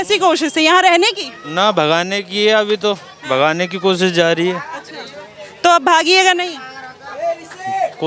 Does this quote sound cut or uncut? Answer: uncut